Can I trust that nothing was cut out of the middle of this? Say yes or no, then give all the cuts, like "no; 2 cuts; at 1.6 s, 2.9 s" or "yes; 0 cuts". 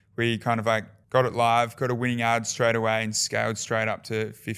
yes; 0 cuts